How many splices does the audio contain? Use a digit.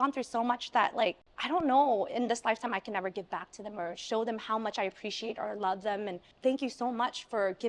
2